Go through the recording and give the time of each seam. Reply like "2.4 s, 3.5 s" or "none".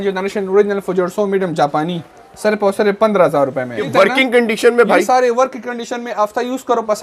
3.9 s